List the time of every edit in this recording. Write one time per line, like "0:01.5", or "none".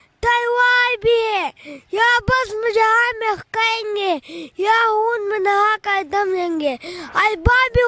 none